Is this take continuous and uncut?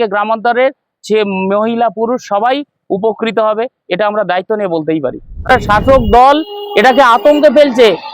no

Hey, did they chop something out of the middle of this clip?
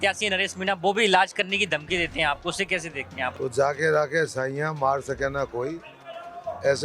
yes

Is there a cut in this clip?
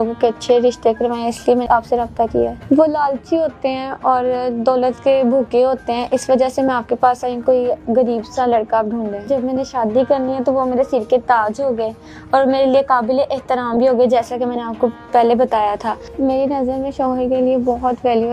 yes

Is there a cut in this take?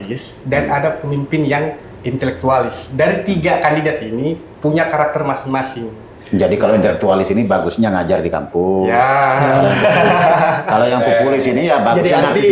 no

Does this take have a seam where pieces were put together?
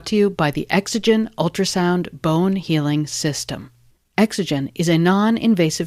no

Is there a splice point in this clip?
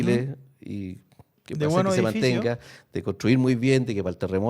no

